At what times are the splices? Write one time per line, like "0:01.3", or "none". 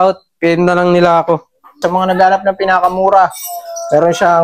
0:01.8